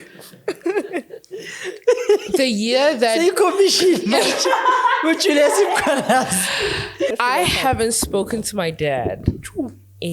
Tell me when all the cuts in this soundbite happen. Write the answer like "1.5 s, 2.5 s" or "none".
7.1 s